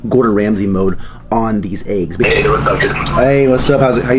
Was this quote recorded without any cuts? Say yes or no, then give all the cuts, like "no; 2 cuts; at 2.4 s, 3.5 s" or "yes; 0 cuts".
no; 1 cut; at 2.2 s